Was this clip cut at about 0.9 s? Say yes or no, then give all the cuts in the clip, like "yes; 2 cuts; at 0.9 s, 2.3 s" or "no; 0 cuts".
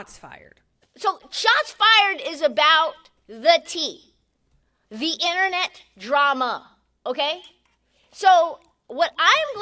yes; 1 cut; at 0.9 s